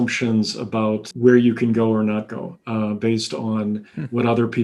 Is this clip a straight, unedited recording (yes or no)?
no